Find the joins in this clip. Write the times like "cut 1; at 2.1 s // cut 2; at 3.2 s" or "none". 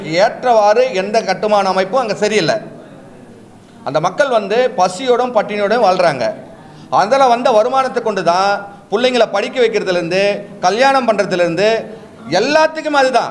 none